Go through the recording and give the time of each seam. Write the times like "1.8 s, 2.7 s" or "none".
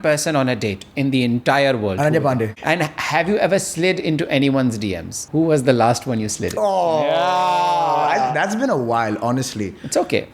2.6 s, 5.1 s

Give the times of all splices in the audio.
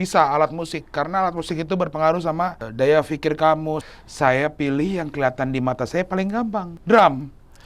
2.6 s, 3.8 s, 6.7 s

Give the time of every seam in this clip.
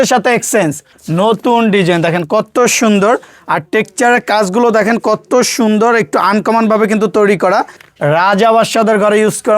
0.9 s, 7.8 s

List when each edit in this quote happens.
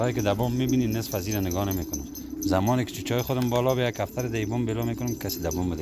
none

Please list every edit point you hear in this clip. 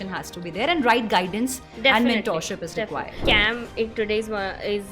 3.1 s

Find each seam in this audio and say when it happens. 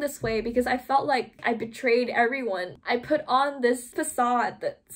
1.4 s, 2.8 s

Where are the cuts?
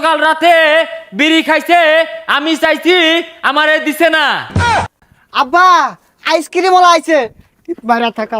4.7 s

